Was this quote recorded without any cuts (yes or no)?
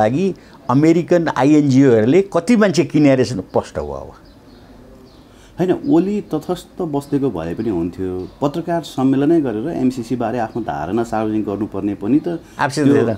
yes